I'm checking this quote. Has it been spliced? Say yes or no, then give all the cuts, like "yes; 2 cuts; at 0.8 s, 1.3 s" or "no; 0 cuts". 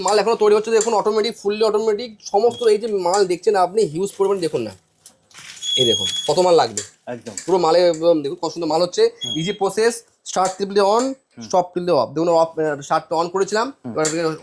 no; 0 cuts